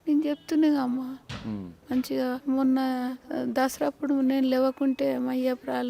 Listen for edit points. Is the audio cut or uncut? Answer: cut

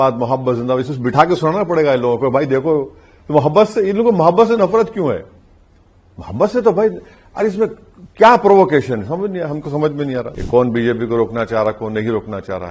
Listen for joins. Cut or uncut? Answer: cut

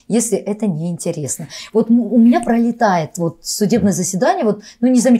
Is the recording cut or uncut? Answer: uncut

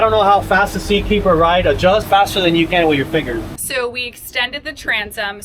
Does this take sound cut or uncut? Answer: cut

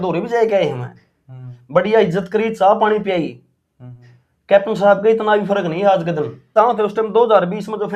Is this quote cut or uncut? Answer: cut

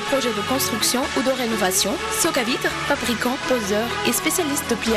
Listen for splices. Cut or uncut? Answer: uncut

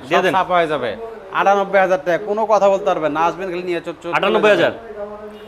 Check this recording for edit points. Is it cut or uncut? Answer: uncut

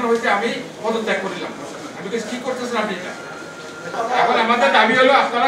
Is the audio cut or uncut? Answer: cut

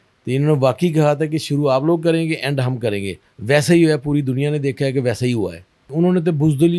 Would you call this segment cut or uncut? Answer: cut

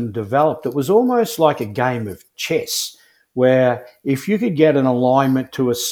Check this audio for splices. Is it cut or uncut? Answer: cut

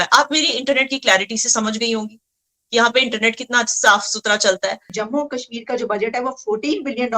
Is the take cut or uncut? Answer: cut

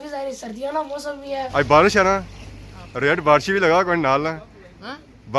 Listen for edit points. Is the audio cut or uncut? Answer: cut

